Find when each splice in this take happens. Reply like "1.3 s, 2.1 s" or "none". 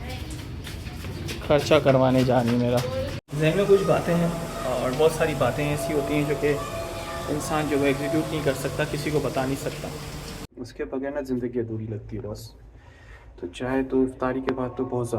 3.2 s, 10.4 s